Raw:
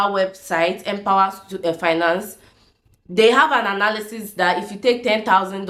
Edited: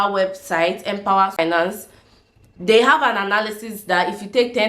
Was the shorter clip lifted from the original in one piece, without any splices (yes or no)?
no